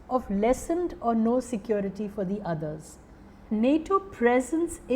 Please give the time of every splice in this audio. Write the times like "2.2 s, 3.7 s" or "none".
3.3 s

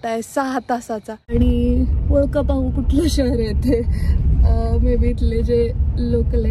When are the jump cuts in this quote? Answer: 1.2 s

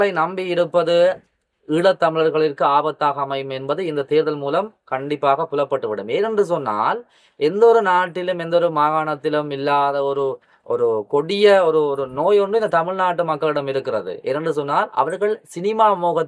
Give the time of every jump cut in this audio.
none

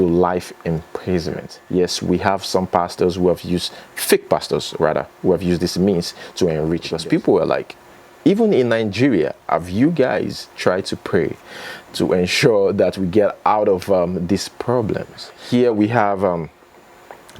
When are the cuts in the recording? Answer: 1.5 s, 6.8 s, 15.4 s

